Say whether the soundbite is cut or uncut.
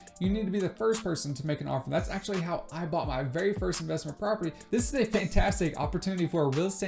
cut